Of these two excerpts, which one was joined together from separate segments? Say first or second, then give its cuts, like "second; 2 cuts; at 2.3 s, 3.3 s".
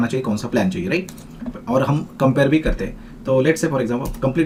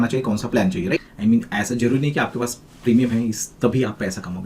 second; 1 cut; at 1.1 s